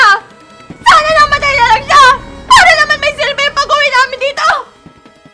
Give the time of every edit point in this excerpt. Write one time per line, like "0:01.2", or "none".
none

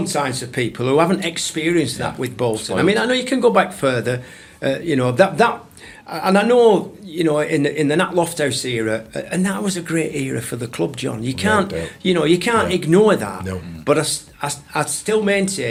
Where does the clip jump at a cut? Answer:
none

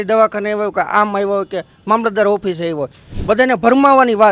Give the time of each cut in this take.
0:03.1

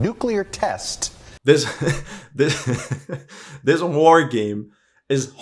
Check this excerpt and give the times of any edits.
0:01.3

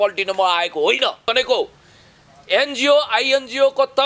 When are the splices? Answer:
0:01.3

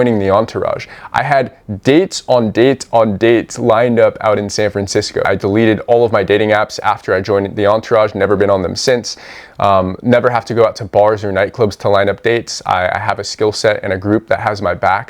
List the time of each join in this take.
0:05.3

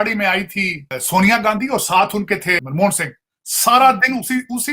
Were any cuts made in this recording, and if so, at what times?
0:01.0
0:02.6

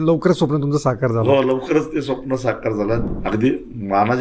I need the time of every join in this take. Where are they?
0:03.0

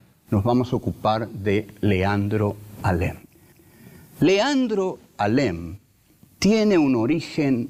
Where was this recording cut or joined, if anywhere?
none

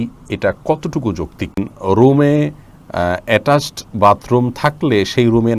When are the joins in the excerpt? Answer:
0:01.7

